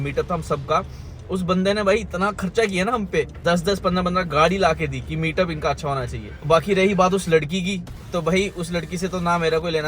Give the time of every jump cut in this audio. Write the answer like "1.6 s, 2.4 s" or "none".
3.3 s